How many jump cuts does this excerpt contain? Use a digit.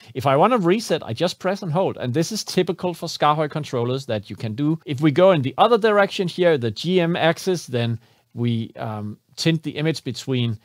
1